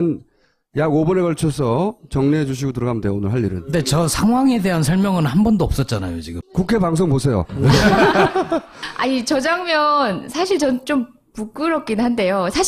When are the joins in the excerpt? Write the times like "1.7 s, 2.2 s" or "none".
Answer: 2.6 s